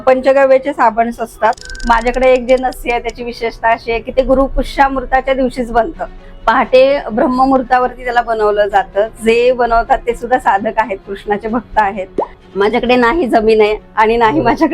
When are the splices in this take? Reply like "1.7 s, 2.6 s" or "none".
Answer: 1.7 s, 12.3 s